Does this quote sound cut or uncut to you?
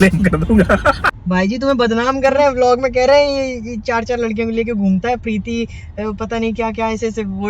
cut